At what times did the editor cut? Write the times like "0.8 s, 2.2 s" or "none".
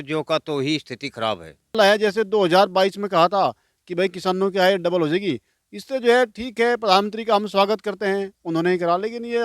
1.7 s